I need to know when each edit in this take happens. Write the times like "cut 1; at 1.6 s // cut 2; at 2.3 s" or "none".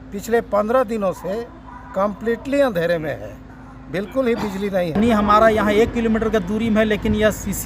cut 1; at 5.0 s